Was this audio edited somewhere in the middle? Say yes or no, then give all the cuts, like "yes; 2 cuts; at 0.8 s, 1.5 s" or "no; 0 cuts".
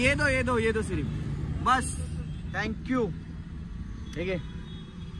no; 0 cuts